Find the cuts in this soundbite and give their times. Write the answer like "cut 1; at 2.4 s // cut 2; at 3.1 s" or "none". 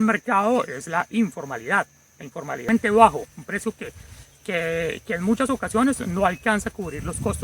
cut 1; at 2.7 s